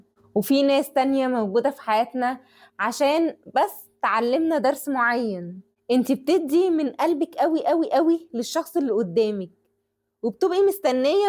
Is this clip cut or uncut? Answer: cut